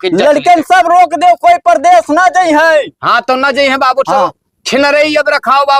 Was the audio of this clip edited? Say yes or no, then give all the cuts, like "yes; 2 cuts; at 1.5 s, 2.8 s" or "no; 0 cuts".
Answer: no; 0 cuts